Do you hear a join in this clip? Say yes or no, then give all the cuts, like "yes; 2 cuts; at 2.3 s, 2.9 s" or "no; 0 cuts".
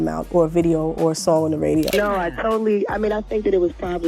yes; 1 cut; at 1.9 s